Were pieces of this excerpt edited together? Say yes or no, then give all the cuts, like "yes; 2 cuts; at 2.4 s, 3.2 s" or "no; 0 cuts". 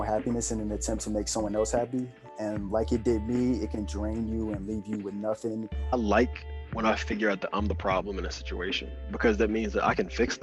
yes; 1 cut; at 5.9 s